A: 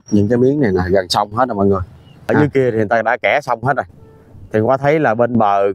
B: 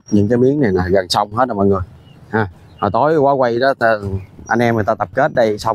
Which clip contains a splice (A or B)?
A